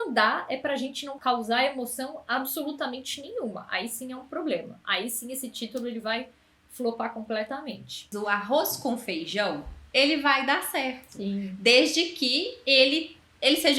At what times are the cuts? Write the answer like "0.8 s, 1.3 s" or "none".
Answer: 1.1 s, 8.1 s